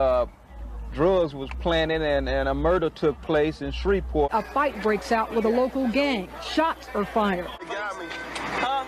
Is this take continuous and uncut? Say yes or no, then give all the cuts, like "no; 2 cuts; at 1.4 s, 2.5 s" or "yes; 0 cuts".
no; 2 cuts; at 4.3 s, 7.6 s